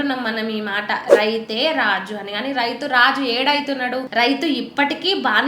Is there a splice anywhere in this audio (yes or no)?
yes